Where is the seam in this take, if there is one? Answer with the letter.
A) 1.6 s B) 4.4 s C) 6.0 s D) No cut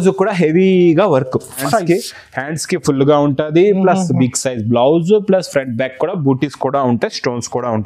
A